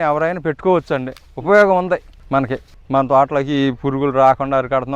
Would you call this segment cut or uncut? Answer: uncut